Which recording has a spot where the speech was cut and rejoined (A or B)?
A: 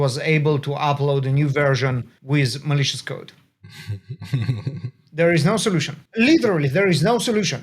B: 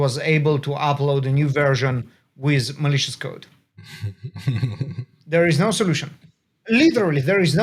A